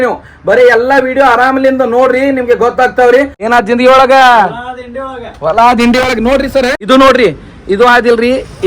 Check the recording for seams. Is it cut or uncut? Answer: cut